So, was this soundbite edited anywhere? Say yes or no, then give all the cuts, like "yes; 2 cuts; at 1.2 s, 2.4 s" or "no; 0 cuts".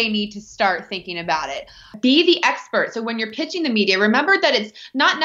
yes; 1 cut; at 2.0 s